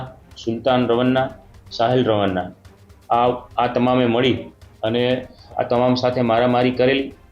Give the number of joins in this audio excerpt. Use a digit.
1